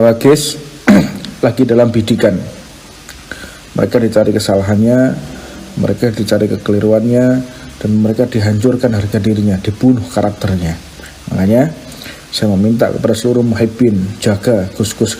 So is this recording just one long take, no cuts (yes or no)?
yes